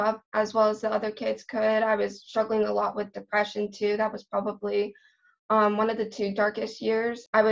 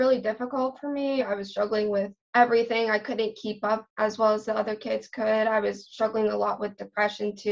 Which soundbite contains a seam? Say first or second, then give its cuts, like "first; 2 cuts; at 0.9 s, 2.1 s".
second; 1 cut; at 1.2 s